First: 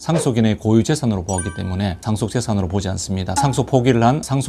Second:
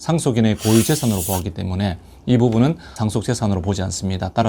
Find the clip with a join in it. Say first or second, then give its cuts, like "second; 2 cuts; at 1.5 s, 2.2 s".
first; 2 cuts; at 2.0 s, 3.3 s